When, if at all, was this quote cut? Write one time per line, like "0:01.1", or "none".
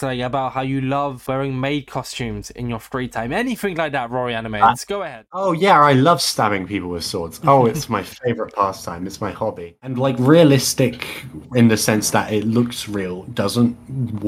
0:05.4
0:09.9